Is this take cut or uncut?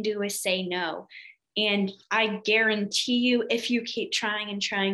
uncut